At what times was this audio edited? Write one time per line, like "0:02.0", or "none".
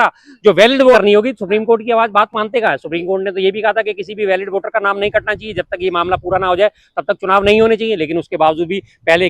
0:00.9